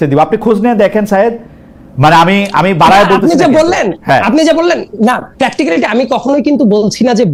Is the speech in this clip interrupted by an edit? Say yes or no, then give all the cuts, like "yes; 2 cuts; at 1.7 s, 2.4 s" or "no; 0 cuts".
no; 0 cuts